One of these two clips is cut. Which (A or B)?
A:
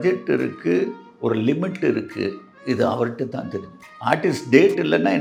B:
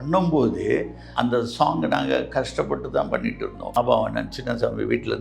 B